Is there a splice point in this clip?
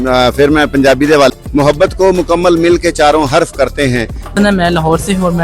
yes; 2 cuts; at 1.3 s, 4.3 s

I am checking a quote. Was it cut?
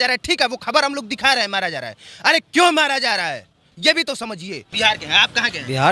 yes; 1 cut; at 4.6 s

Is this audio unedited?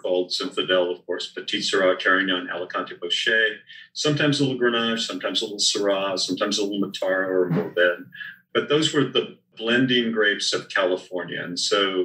yes; 0 cuts

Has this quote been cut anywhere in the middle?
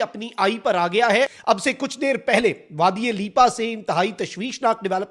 yes; 1 cut; at 1.4 s

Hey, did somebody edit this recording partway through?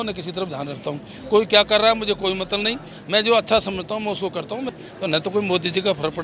yes; 1 cut; at 4.7 s

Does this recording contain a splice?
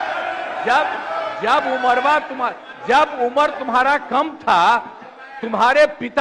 no; 0 cuts

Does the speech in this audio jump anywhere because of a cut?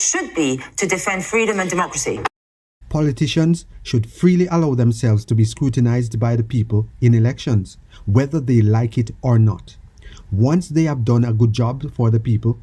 no; 0 cuts

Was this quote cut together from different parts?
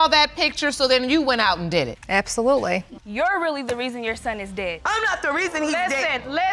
yes; 2 cuts; at 2.0 s, 2.9 s

